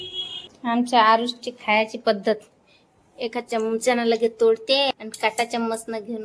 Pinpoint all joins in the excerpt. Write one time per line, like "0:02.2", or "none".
none